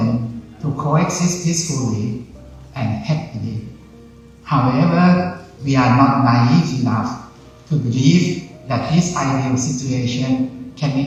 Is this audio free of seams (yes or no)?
yes